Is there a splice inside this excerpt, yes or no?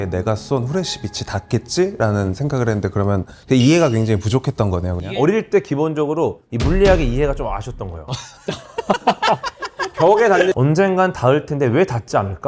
yes